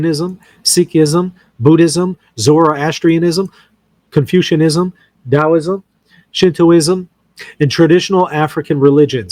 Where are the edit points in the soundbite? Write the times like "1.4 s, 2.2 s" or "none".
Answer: none